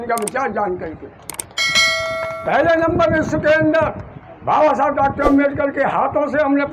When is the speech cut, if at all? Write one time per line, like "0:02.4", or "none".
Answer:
none

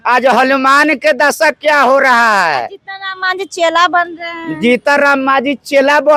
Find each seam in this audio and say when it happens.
none

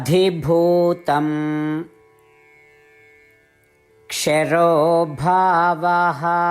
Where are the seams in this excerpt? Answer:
0:02.5
0:04.1

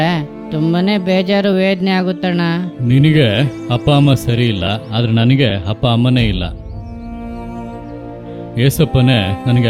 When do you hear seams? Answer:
0:02.7
0:06.6
0:08.5

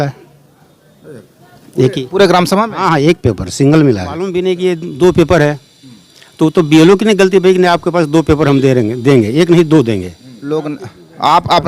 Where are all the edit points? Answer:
0:04.4
0:10.5

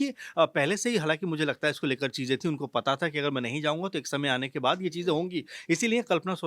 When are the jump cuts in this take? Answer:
none

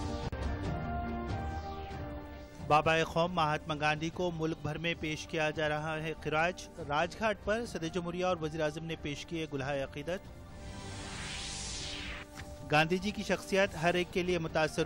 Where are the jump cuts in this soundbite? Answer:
none

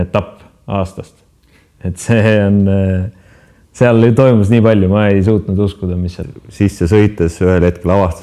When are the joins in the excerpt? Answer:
0:06.1

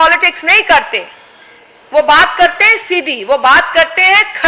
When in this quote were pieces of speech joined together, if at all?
none

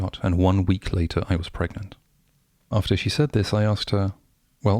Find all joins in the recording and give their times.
0:02.7

